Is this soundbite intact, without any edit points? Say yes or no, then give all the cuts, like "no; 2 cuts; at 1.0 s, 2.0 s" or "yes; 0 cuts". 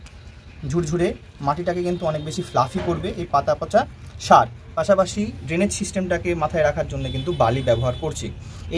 yes; 0 cuts